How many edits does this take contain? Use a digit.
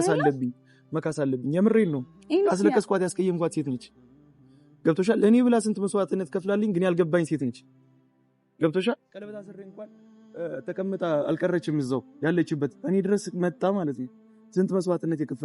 0